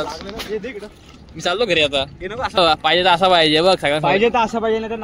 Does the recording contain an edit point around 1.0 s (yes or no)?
no